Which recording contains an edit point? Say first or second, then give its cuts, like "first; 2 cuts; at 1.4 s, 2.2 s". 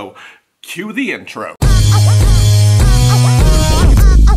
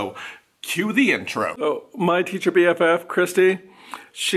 second; 1 cut; at 1.6 s